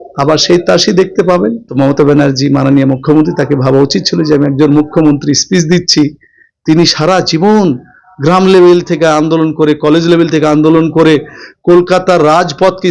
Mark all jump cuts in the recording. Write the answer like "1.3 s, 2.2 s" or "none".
1.6 s